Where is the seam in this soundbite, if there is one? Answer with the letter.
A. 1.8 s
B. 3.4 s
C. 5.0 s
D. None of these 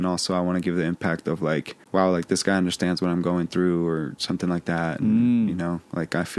A